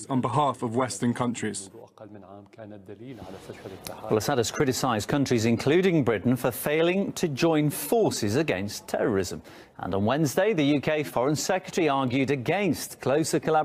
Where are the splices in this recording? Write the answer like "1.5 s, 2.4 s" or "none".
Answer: none